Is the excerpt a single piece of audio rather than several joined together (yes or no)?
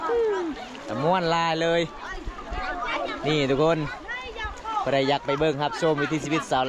yes